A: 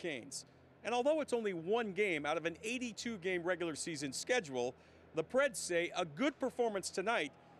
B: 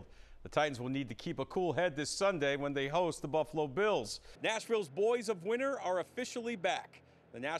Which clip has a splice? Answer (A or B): B